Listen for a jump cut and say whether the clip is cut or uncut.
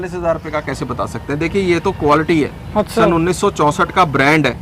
uncut